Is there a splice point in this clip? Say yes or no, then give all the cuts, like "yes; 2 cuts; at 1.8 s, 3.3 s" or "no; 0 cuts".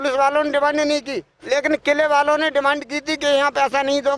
no; 0 cuts